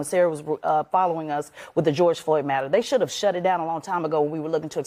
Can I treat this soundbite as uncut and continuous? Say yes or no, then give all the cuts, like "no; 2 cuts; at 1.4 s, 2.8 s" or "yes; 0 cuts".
yes; 0 cuts